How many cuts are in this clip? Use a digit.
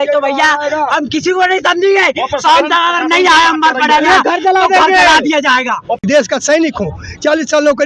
1